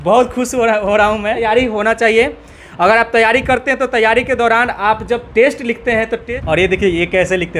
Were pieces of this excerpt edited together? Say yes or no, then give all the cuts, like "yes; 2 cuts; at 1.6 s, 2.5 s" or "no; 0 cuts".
yes; 2 cuts; at 1.5 s, 6.2 s